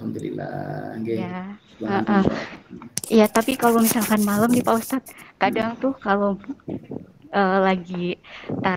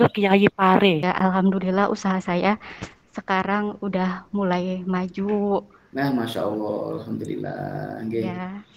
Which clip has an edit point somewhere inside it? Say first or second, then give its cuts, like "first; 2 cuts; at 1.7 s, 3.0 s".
second; 1 cut; at 1.0 s